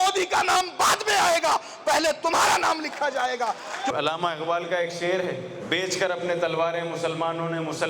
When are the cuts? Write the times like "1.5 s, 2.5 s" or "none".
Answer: 3.9 s, 5.5 s